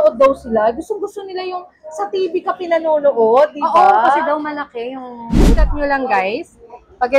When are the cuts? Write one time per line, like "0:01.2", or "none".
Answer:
0:05.5